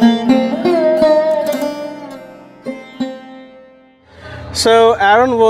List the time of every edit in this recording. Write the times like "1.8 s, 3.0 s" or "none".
4.4 s